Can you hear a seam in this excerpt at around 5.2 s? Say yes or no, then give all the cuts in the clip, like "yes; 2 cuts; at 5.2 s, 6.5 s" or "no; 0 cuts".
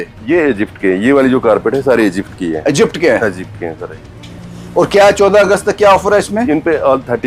no; 0 cuts